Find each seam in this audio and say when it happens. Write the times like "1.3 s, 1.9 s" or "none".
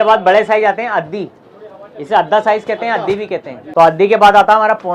3.6 s